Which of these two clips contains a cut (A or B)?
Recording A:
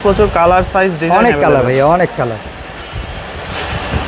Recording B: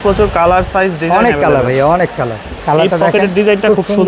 B